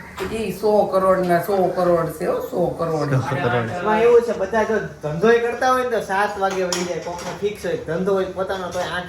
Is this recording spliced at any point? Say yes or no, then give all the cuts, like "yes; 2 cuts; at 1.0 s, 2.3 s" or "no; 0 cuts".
yes; 1 cut; at 3.6 s